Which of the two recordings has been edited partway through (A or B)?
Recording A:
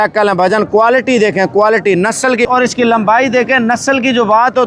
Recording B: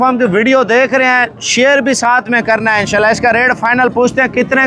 A